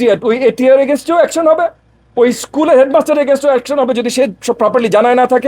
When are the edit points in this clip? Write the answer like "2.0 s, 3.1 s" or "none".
none